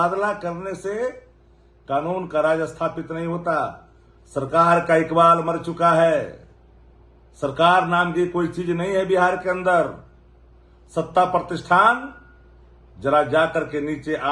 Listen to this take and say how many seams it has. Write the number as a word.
zero